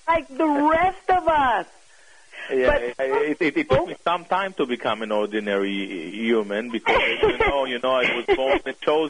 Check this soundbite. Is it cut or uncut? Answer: cut